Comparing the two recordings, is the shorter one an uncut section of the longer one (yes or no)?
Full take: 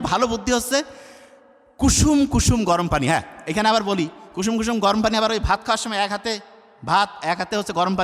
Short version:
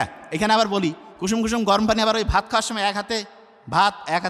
yes